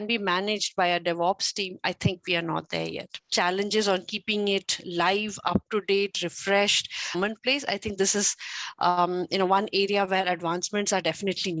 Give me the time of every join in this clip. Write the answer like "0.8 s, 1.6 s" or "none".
3.2 s, 7.2 s